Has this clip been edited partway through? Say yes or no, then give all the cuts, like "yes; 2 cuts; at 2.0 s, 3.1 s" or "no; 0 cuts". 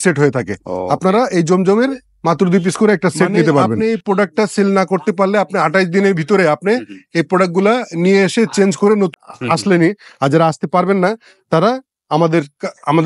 yes; 2 cuts; at 3.7 s, 9.3 s